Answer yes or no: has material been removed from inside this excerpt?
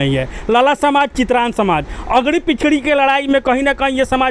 no